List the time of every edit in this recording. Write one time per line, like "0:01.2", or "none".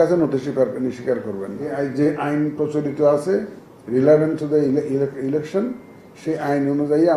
0:01.7